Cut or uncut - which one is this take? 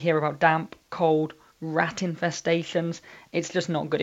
uncut